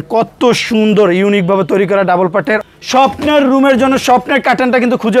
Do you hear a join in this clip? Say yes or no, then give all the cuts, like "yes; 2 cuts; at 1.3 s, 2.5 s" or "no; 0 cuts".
yes; 1 cut; at 2.6 s